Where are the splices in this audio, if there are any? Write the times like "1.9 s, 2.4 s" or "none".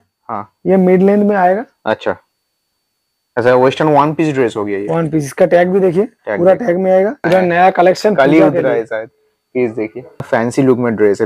7.2 s, 10.3 s